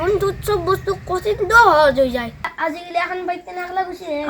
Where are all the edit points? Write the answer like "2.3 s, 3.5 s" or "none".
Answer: 2.5 s